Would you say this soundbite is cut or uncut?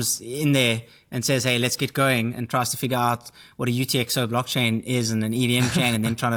uncut